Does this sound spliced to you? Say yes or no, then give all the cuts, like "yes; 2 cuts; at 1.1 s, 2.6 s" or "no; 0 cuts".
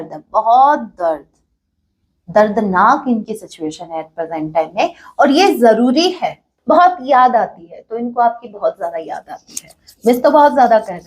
yes; 1 cut; at 6.5 s